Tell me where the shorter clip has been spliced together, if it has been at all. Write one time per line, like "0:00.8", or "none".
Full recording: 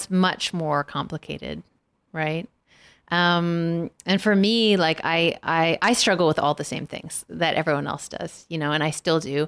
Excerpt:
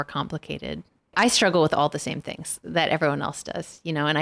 0:01.1

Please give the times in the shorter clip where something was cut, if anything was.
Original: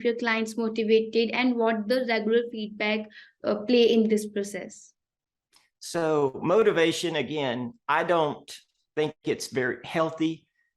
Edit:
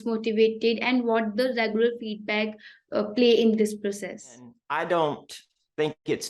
0:04.6

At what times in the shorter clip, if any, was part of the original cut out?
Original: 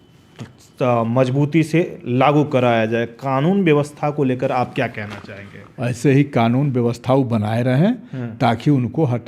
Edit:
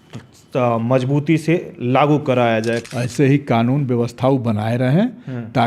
0:02.9

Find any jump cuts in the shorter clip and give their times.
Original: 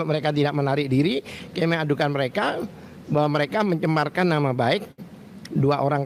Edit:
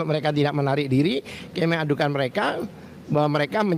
none

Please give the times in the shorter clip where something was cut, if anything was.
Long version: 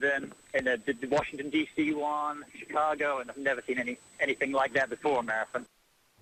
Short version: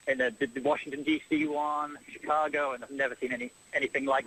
none

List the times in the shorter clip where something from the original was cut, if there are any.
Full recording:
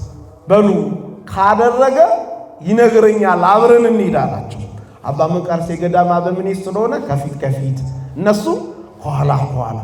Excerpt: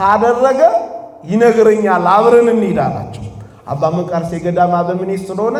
none

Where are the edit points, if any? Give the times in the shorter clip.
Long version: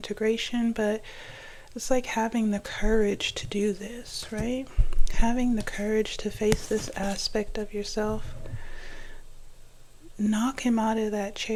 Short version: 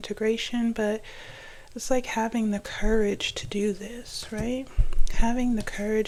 none

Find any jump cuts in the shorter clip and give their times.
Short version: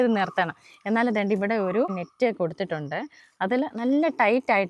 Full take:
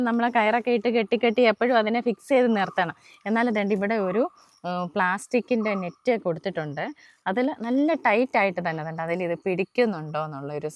0:02.0

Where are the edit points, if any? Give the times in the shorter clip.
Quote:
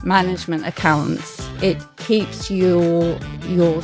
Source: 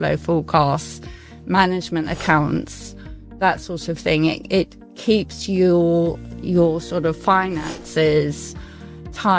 0:01.8

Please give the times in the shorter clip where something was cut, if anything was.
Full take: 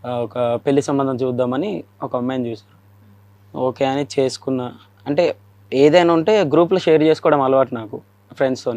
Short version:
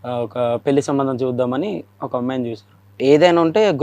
0:02.8

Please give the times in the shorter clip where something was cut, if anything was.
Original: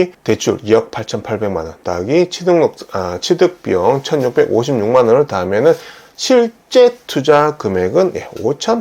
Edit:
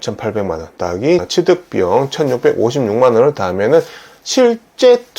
0:01.3

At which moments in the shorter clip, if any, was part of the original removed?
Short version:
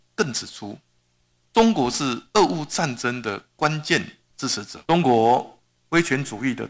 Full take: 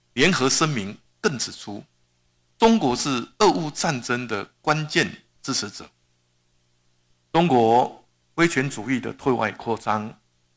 0:04.7

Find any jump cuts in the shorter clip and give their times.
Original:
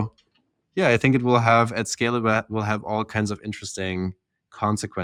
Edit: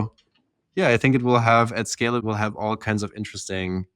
0:02.2

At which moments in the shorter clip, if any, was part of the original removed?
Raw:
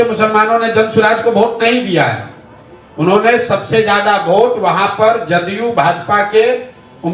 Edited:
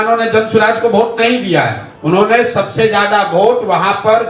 0:01.9

